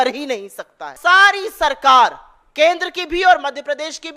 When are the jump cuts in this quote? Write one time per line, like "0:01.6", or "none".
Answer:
0:00.9

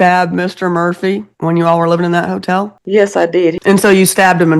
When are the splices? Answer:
0:01.3
0:02.8
0:03.6

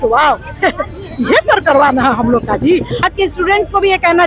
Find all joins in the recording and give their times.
0:03.0

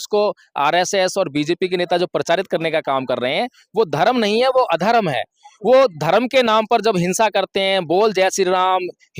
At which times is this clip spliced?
none

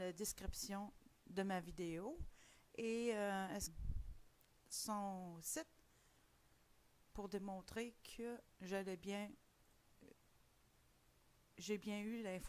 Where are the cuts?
none

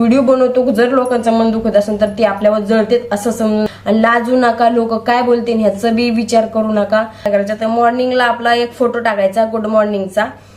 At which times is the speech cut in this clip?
0:03.7
0:07.3

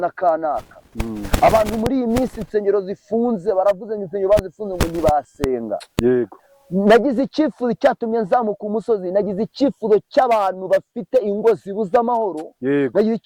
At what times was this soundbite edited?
0:06.3

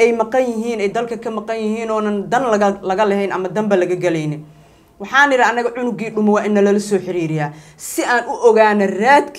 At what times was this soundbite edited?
none

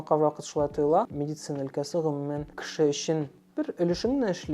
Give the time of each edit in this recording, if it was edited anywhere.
0:01.1
0:02.6
0:03.4

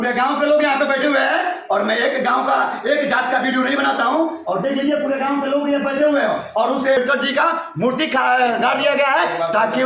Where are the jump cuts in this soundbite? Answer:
0:07.0

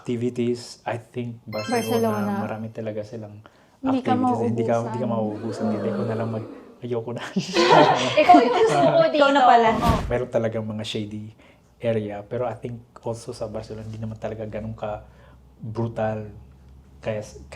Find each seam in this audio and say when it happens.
0:10.0

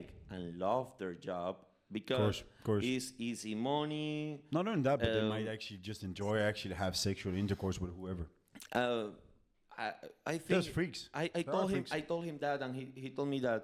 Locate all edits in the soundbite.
none

